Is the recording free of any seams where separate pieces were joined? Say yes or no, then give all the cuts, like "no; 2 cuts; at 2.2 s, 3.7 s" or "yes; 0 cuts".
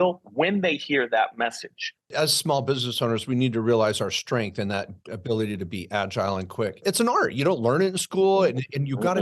no; 2 cuts; at 2.1 s, 6.8 s